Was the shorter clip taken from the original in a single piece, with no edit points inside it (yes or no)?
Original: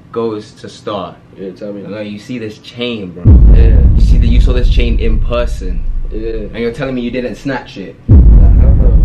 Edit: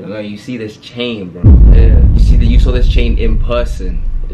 yes